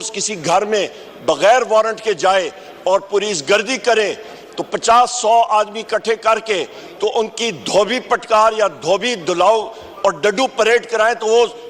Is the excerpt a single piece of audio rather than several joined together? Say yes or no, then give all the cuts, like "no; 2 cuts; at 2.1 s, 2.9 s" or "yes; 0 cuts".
yes; 0 cuts